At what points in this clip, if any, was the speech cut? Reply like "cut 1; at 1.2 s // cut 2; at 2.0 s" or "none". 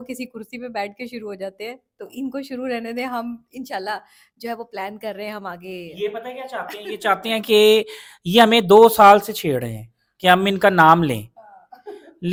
none